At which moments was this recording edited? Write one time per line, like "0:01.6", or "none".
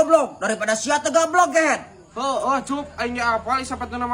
none